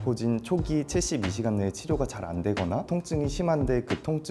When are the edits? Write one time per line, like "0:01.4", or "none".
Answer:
0:02.9